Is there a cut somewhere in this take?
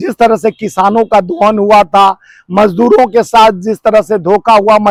no; 0 cuts

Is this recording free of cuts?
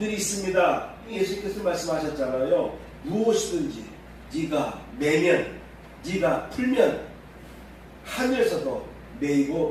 no; 1 cut; at 1.1 s

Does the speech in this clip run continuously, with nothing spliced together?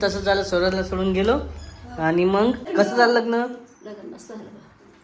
no; 1 cut; at 2.6 s

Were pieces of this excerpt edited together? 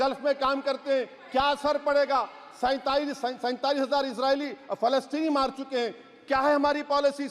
no; 0 cuts

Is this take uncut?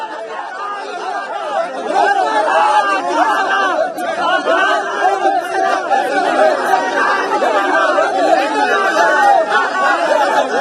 yes; 0 cuts

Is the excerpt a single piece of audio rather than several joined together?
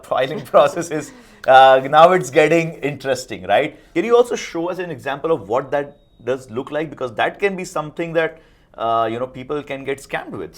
no; 1 cut; at 3.8 s

